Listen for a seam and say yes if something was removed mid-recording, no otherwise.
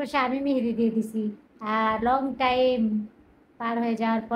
no